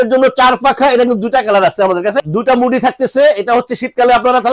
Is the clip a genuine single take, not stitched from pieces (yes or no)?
no